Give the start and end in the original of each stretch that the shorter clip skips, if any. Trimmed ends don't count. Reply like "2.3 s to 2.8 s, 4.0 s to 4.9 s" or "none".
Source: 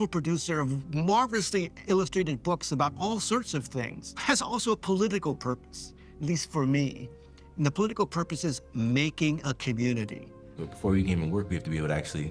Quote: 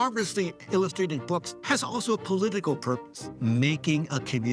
2.7 s to 4.1 s, 5.9 s to 8.6 s